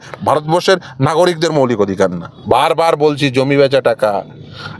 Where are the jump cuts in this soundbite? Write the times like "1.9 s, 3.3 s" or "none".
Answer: 2.3 s